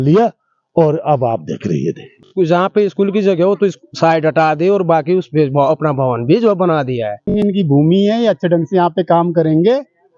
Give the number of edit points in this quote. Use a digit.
2